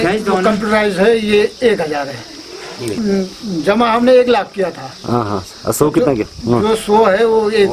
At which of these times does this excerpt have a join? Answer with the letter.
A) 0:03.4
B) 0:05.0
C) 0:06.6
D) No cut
D